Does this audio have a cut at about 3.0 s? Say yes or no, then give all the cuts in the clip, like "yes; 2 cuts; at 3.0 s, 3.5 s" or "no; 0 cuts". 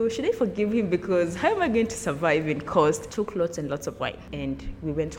yes; 2 cuts; at 3.0 s, 4.2 s